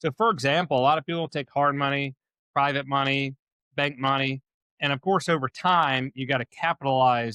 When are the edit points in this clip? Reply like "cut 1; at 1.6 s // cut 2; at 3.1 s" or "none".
none